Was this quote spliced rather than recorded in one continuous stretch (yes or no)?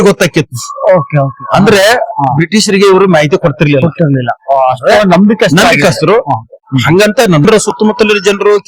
yes